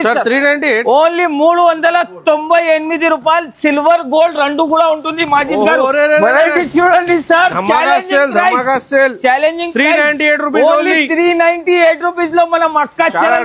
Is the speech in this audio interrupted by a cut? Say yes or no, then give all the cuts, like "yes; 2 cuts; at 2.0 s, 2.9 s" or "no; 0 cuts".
no; 0 cuts